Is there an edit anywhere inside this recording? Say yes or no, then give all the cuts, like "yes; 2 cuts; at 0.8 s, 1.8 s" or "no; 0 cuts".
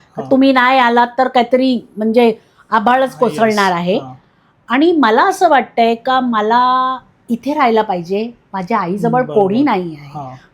no; 0 cuts